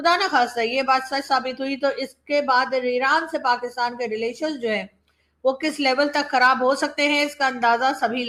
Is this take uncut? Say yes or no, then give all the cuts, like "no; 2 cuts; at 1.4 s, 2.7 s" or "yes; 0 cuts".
yes; 0 cuts